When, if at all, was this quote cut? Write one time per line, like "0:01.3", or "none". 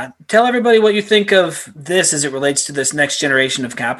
0:01.7